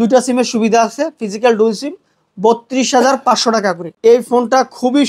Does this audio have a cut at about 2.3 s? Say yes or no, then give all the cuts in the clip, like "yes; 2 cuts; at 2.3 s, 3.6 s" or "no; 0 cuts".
no; 1 cut; at 3.9 s